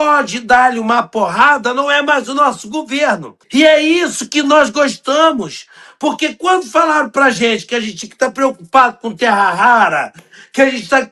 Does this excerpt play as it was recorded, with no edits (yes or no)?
no